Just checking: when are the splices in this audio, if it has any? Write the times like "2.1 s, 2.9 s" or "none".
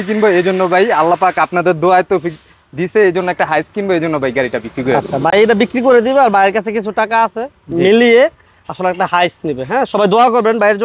none